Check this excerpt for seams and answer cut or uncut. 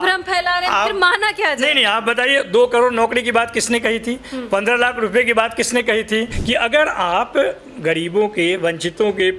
cut